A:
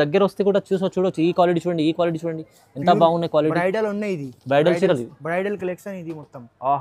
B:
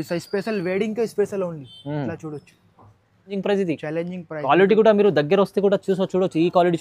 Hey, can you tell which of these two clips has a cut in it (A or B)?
B